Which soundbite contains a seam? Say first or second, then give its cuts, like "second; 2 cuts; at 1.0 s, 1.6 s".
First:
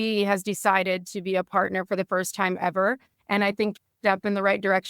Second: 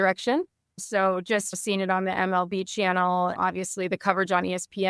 first; 1 cut; at 3.7 s